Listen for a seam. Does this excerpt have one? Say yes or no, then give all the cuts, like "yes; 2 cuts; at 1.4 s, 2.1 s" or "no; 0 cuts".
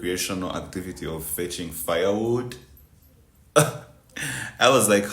no; 0 cuts